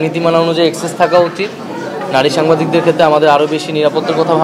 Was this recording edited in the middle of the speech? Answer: no; 0 cuts

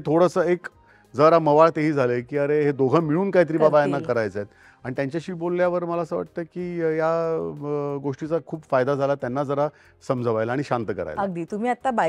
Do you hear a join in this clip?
no; 0 cuts

